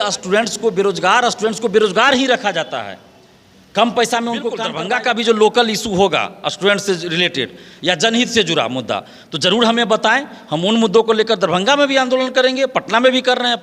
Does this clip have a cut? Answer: yes; 1 cut; at 4.7 s

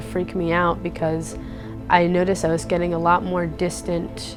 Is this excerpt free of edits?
yes; 0 cuts

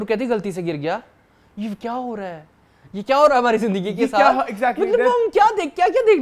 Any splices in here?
no; 0 cuts

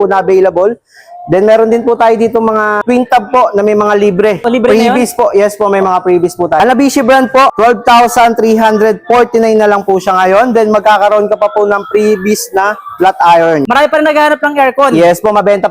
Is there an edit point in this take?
yes; 5 cuts; at 2.8 s, 4.4 s, 6.6 s, 7.5 s, 13.6 s

